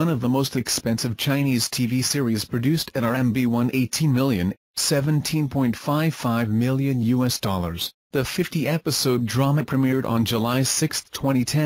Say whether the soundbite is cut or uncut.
cut